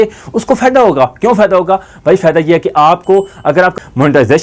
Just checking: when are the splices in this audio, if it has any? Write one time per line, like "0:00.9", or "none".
none